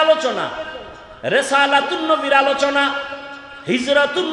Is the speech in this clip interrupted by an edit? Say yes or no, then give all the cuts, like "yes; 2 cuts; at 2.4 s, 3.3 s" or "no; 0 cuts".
no; 0 cuts